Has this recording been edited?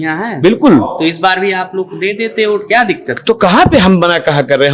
no; 0 cuts

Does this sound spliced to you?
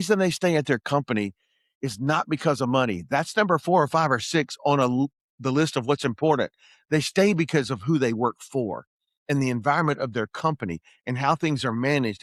no; 0 cuts

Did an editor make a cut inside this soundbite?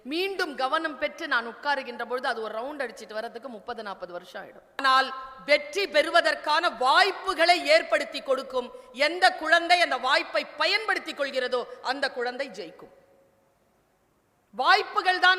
yes; 1 cut; at 4.8 s

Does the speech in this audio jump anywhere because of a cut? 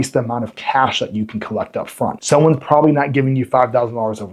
no; 0 cuts

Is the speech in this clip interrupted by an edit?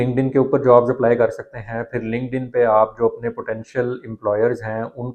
no; 0 cuts

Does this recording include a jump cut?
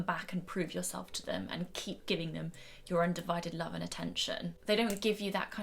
yes; 1 cut; at 4.5 s

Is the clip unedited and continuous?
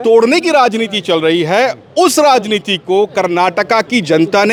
yes; 0 cuts

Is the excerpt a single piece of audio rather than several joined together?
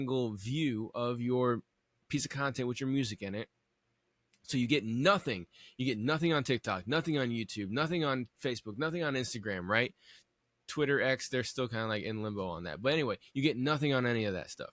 yes; 0 cuts

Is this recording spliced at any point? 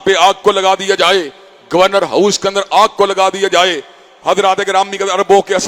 no; 0 cuts

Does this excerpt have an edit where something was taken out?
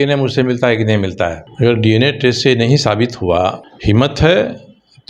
yes; 2 cuts; at 1.4 s, 3.7 s

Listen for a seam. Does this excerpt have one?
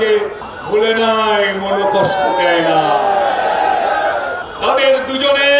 yes; 1 cut; at 4.4 s

